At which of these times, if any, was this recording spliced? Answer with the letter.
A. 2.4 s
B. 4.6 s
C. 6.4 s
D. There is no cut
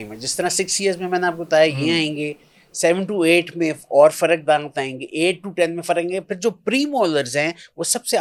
D